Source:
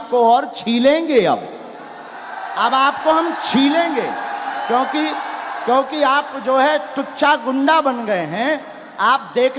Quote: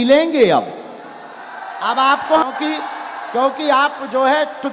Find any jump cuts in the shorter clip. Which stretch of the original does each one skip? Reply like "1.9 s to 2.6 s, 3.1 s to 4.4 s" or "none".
3.2 s to 4.8 s